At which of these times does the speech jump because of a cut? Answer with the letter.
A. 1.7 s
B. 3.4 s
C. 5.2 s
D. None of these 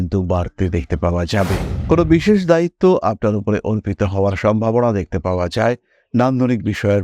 A